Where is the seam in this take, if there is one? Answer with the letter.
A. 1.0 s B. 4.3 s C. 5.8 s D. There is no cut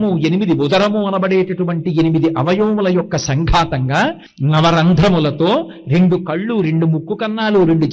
B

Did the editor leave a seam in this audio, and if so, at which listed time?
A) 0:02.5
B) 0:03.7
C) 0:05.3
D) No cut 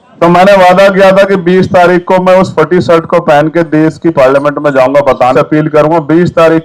C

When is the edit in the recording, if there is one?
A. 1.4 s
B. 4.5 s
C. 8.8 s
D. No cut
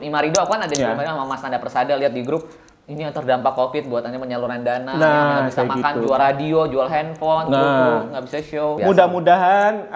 C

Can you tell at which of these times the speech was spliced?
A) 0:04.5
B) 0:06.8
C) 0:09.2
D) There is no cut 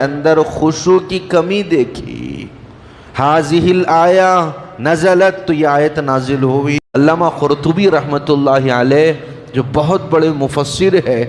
B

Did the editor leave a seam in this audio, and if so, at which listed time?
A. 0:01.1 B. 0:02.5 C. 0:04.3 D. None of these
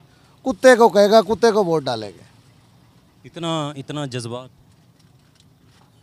D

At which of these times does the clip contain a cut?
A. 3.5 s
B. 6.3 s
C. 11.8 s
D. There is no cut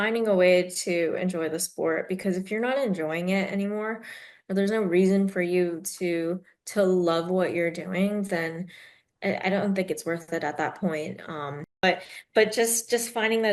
C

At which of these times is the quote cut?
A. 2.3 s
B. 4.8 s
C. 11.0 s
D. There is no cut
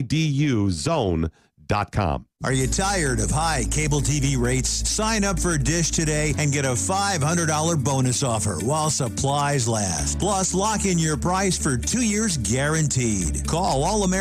A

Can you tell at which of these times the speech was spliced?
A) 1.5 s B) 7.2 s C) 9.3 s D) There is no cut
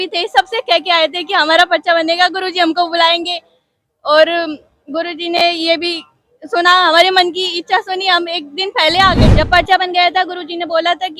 C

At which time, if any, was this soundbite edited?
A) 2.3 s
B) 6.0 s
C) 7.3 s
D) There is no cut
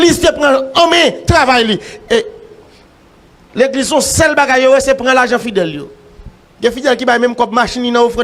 B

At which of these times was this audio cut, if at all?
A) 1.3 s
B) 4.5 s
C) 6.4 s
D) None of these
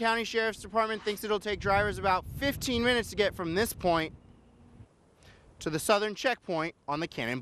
D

